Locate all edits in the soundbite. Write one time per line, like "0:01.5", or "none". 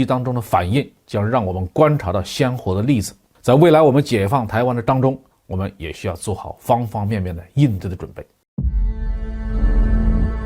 0:08.4